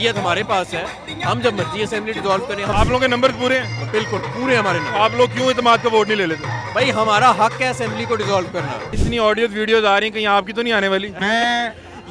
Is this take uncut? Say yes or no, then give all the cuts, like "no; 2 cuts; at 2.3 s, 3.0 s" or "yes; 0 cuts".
no; 2 cuts; at 2.7 s, 8.9 s